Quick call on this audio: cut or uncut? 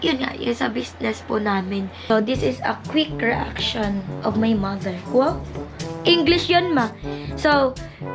cut